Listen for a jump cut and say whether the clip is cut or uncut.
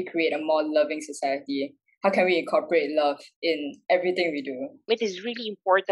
cut